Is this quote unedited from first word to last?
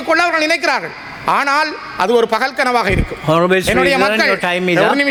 yes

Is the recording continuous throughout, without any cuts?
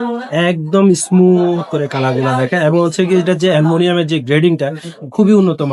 yes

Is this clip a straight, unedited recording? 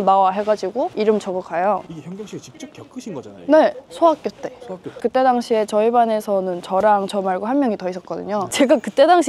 no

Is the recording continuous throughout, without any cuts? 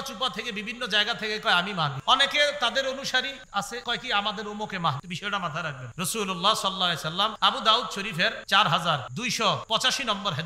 no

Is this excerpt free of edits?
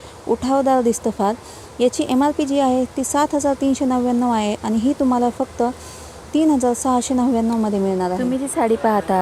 no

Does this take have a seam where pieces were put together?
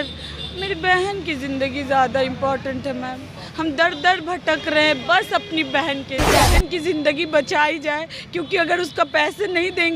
yes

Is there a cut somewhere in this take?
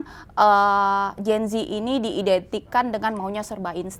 no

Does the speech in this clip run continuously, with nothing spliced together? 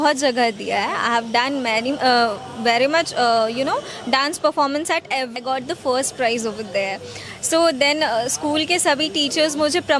no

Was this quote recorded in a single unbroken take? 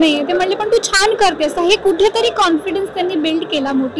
yes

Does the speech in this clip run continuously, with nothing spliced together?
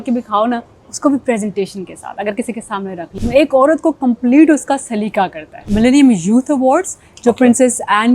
no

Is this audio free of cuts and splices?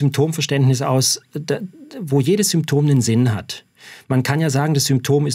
yes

